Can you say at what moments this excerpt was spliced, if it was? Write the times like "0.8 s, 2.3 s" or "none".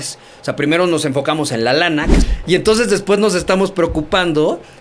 2.2 s